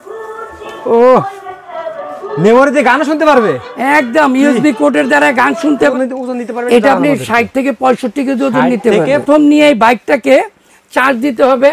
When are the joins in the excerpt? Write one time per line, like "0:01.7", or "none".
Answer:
0:05.9
0:09.2